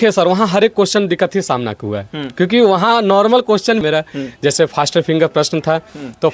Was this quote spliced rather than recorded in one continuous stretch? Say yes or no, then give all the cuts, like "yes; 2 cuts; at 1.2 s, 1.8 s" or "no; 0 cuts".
yes; 1 cut; at 3.8 s